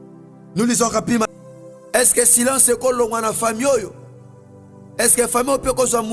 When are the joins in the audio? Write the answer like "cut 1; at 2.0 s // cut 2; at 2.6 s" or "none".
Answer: cut 1; at 1.3 s